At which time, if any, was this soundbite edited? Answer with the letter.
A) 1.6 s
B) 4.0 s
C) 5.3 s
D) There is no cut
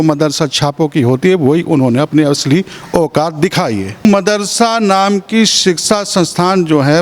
B